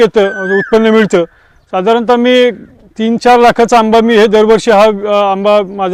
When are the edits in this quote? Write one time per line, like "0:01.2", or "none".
none